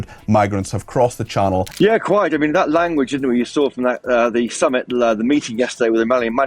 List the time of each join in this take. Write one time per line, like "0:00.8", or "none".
0:01.7